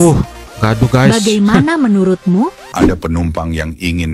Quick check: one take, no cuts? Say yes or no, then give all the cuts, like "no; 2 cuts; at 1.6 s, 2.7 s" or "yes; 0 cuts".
no; 1 cut; at 2.7 s